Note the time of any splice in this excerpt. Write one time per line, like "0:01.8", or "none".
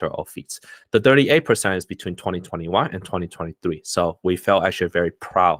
none